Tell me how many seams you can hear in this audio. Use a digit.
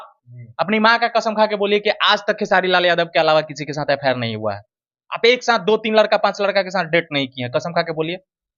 0